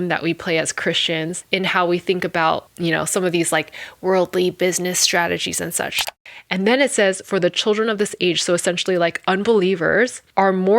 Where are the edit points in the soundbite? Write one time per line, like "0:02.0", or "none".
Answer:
0:01.4
0:06.1